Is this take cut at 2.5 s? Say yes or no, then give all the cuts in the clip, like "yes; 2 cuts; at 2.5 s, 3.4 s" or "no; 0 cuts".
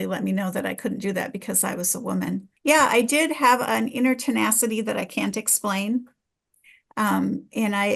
yes; 1 cut; at 2.5 s